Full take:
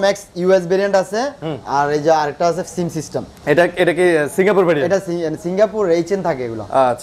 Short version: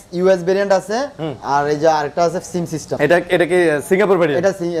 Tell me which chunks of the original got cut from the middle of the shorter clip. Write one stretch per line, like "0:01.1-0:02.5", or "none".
0:03.1-0:03.3